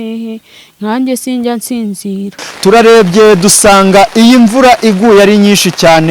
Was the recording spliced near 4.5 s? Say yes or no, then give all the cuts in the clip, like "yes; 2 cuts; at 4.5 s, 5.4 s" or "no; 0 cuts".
no; 1 cut; at 2.5 s